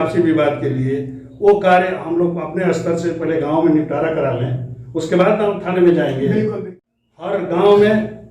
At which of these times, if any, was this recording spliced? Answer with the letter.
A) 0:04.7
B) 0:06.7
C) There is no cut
B